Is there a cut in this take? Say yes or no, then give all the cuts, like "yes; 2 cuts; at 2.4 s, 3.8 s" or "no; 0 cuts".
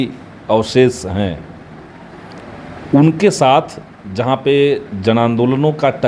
no; 0 cuts